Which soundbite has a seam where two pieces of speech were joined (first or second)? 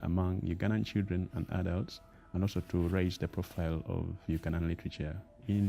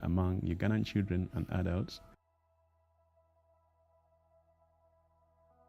first